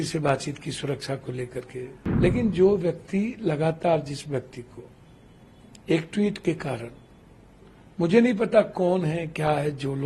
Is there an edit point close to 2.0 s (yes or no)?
yes